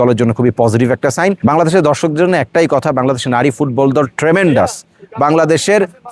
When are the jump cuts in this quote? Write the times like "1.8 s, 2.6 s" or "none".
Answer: 1.4 s